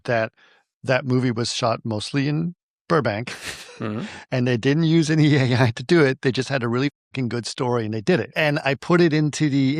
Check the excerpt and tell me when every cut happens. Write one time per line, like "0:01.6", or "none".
0:08.4